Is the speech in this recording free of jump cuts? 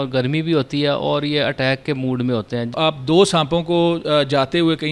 no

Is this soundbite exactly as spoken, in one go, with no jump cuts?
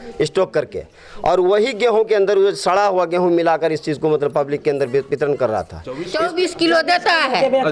no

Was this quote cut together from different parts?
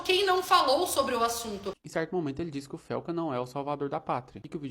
yes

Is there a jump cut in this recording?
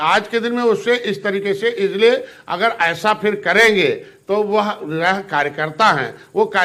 no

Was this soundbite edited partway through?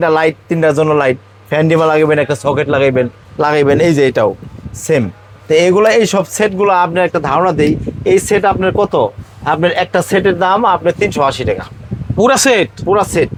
no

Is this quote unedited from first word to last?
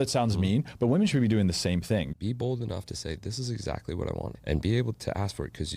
no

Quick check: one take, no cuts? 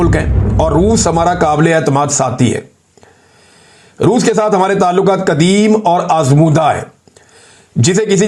yes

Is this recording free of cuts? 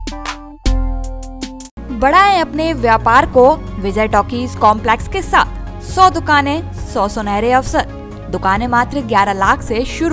yes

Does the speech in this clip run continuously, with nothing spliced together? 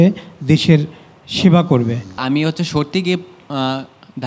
no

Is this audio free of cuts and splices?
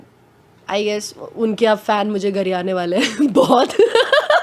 yes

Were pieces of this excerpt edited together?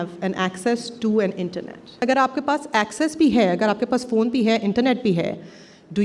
yes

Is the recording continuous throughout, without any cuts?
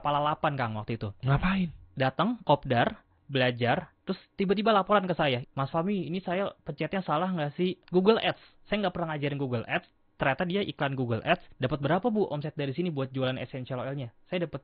no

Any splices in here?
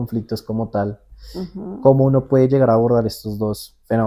no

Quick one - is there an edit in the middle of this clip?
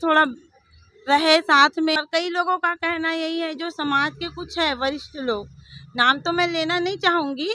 yes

